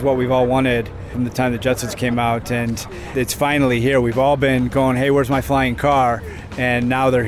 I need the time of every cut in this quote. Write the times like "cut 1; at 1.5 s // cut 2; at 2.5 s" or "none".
cut 1; at 1.0 s // cut 2; at 3.1 s